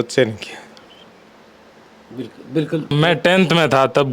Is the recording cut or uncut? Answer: cut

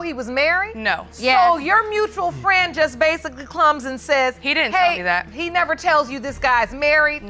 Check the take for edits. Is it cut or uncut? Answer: uncut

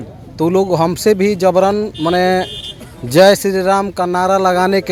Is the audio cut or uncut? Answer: uncut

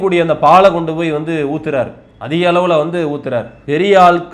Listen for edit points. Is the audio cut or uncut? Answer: uncut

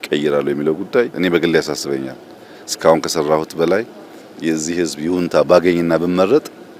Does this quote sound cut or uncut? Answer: cut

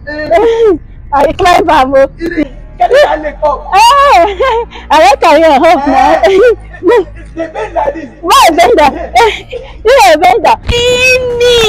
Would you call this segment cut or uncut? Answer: cut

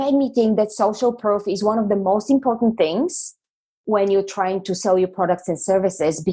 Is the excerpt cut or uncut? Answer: uncut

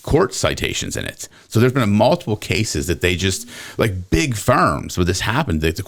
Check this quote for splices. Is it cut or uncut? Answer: uncut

